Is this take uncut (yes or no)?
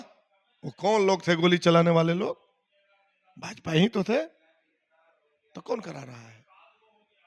yes